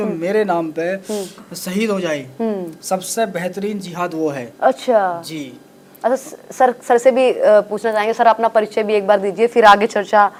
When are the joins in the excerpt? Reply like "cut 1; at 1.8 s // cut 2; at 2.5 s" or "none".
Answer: none